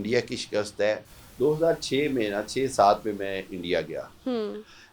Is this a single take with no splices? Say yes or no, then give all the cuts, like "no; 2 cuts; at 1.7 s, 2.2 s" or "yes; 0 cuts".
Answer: no; 1 cut; at 1.2 s